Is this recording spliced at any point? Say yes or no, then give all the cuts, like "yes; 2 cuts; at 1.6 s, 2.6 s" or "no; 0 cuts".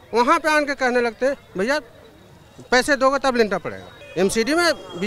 yes; 1 cut; at 3.9 s